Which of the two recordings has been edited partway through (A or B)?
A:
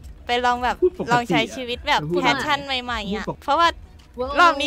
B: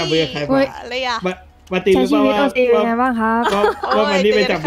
A